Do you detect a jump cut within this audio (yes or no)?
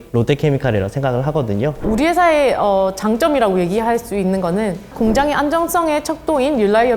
yes